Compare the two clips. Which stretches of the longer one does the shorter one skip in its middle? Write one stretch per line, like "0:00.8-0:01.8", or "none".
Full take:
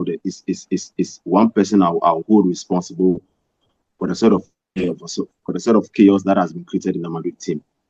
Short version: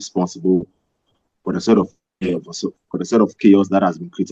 none